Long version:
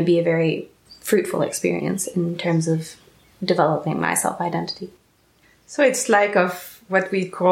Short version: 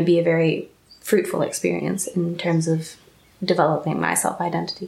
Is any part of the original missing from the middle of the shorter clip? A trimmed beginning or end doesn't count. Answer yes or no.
no